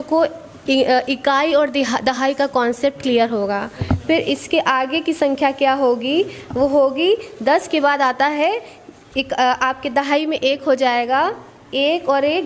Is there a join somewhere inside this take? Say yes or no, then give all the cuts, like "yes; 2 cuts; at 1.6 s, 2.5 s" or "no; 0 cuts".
no; 0 cuts